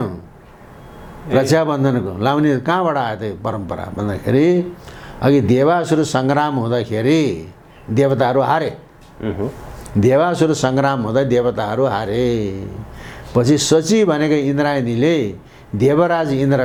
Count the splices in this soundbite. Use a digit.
0